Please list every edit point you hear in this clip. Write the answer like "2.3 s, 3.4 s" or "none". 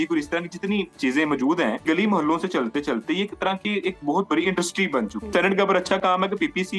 0.9 s, 1.8 s, 5.3 s